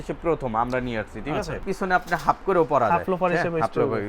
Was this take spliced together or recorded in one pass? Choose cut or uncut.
cut